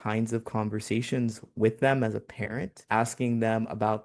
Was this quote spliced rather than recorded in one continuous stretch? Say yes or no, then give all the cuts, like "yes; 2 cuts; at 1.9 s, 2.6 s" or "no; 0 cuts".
no; 0 cuts